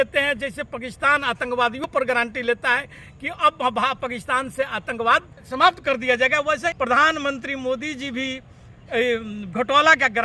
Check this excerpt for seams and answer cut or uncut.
cut